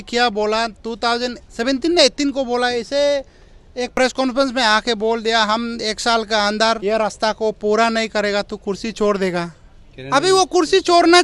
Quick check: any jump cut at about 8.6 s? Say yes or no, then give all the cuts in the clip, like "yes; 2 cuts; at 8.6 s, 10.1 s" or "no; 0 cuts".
no; 3 cuts; at 1.5 s, 3.9 s, 6.8 s